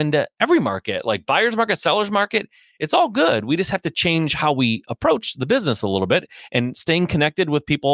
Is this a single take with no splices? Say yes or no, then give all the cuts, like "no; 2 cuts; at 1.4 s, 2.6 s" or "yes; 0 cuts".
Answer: yes; 0 cuts